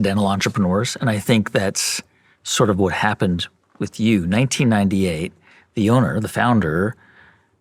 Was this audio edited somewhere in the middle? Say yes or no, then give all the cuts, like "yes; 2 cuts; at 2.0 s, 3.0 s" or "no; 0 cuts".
no; 0 cuts